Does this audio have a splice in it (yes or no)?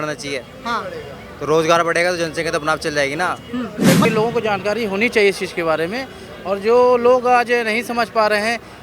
yes